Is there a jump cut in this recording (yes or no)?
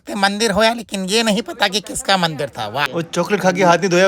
yes